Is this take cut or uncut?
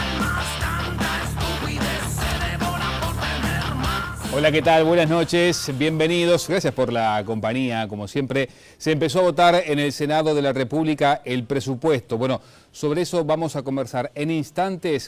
uncut